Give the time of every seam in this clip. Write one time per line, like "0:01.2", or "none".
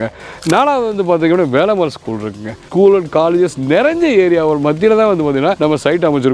0:02.7
0:05.6